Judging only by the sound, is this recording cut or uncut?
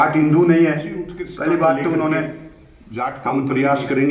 cut